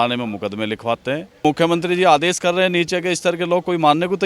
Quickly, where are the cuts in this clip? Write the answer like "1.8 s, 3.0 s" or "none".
1.4 s